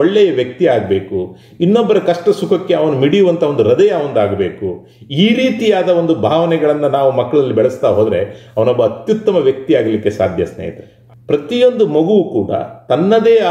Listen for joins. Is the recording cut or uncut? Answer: cut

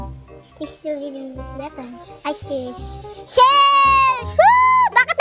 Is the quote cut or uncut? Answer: uncut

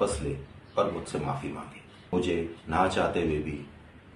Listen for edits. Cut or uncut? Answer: cut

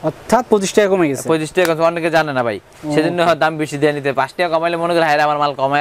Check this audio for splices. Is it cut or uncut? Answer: uncut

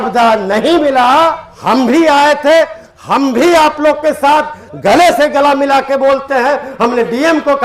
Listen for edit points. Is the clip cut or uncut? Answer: cut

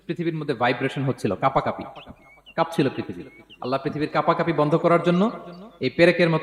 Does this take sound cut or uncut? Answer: uncut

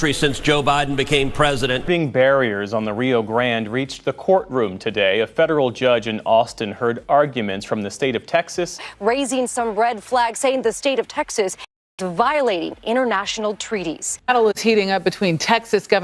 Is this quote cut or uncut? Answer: cut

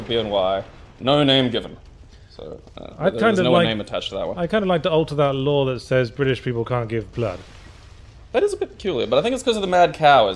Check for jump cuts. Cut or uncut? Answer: uncut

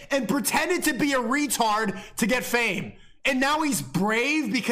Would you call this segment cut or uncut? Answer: uncut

